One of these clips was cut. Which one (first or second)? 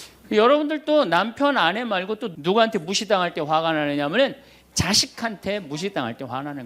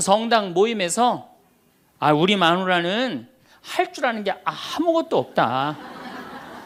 first